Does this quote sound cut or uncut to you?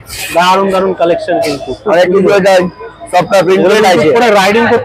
uncut